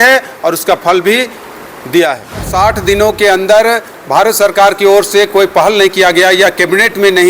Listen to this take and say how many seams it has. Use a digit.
1